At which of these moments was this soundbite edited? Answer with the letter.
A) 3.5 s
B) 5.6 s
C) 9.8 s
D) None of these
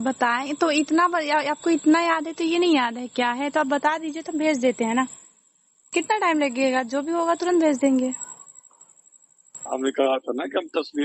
D